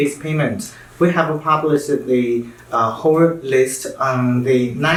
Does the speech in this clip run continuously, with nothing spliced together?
yes; 0 cuts

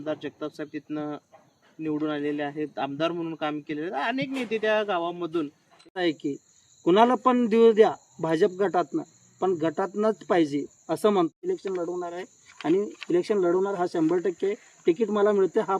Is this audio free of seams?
no; 2 cuts; at 6.0 s, 11.5 s

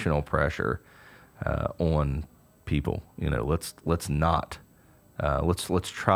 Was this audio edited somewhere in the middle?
no; 0 cuts

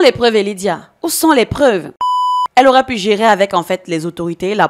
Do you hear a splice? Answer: yes; 1 cut; at 1.9 s

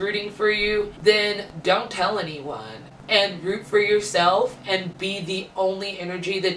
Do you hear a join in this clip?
yes; 1 cut; at 0.9 s

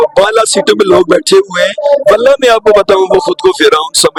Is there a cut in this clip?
no; 0 cuts

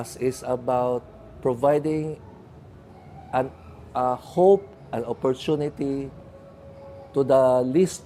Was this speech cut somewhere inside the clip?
no; 0 cuts

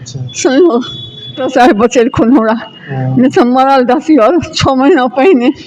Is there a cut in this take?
yes; 1 cut; at 1.4 s

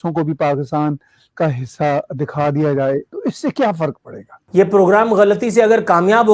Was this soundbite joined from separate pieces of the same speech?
yes; 1 cut; at 4.4 s

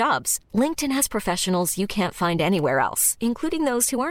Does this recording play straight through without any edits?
yes; 0 cuts

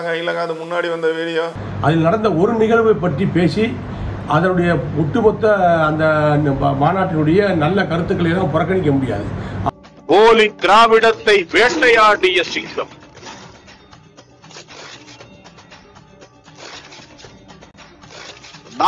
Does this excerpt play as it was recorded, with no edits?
no; 1 cut; at 9.7 s

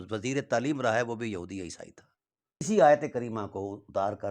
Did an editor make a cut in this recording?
yes; 1 cut; at 2.7 s

